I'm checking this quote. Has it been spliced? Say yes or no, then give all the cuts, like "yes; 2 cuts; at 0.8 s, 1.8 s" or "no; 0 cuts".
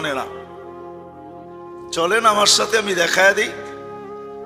yes; 1 cut; at 3.5 s